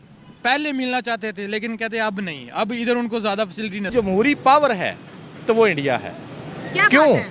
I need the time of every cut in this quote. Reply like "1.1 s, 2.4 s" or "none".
3.9 s